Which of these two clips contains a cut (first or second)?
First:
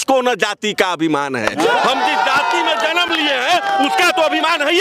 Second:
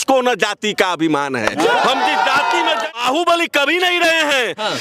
second